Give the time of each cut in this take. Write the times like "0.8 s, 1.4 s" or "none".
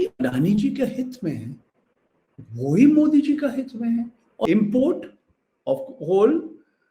4.2 s